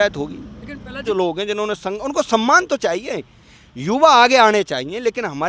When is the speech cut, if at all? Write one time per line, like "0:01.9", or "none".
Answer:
0:01.0